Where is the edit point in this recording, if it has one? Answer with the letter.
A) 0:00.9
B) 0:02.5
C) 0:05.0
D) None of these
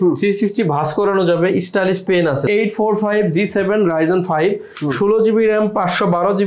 B